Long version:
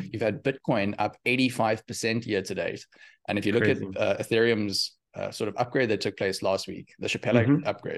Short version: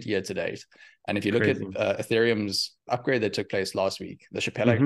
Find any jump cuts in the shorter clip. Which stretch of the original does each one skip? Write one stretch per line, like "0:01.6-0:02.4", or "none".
0:05.0-0:05.5